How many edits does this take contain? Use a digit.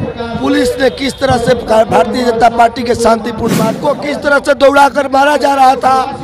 1